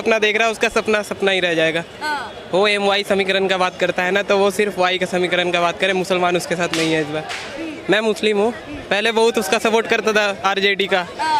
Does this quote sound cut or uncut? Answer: uncut